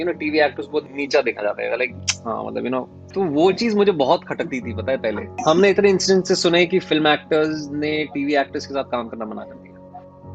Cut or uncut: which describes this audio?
cut